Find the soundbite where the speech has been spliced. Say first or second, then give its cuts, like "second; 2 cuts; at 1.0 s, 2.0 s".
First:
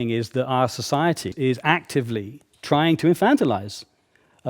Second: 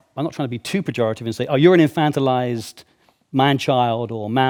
first; 1 cut; at 1.2 s